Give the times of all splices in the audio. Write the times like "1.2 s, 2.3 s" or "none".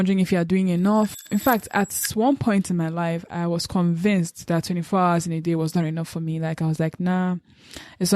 1.2 s